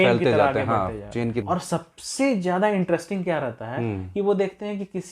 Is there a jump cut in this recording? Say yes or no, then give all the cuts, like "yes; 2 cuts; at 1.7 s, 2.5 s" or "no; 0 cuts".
yes; 1 cut; at 1.4 s